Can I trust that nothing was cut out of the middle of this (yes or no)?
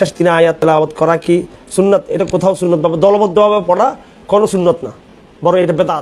yes